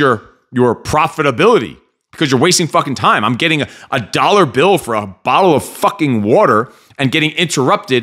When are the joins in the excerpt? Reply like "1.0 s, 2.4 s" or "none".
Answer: none